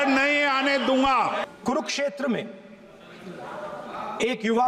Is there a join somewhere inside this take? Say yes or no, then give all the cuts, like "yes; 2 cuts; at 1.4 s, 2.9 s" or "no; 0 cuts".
yes; 1 cut; at 1.5 s